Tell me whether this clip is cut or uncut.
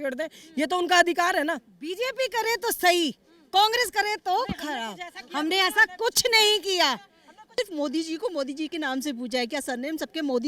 cut